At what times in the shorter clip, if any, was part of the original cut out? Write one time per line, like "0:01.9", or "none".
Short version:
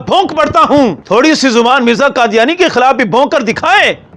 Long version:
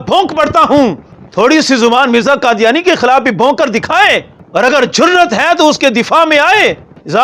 0:01.0